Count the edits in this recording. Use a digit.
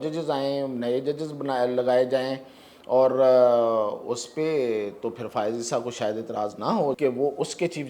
1